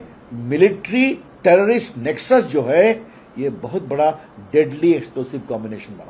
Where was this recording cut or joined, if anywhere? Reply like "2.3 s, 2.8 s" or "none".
none